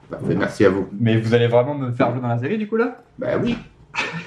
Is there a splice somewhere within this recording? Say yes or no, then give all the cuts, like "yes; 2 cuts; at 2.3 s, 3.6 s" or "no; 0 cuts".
yes; 1 cut; at 0.9 s